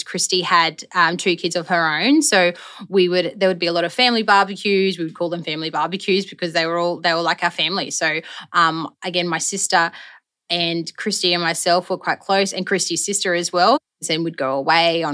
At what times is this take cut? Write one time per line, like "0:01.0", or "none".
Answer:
0:13.9